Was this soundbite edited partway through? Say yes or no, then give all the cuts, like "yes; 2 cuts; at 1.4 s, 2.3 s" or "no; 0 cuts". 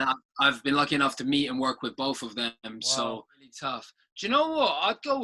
yes; 1 cut; at 3.5 s